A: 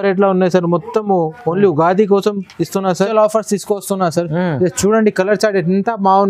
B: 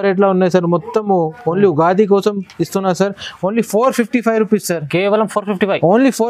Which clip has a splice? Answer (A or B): A